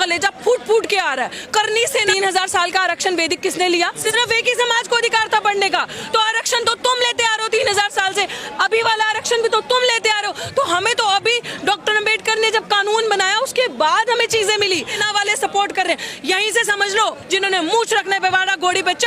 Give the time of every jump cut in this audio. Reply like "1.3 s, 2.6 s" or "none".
2.1 s, 15.0 s, 17.2 s